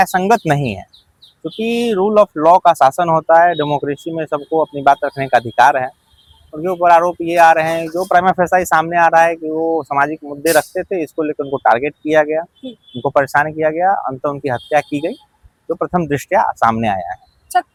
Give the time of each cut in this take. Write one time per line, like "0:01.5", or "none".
none